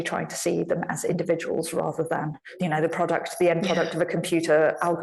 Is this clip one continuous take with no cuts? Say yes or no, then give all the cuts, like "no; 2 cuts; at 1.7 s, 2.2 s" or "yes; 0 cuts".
no; 1 cut; at 2.5 s